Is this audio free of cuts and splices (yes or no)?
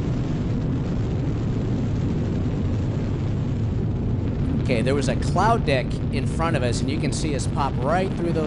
no